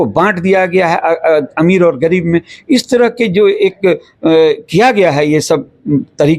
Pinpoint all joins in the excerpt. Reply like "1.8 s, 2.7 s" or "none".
none